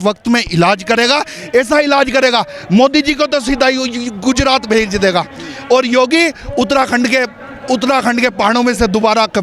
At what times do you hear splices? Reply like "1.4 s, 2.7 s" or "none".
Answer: none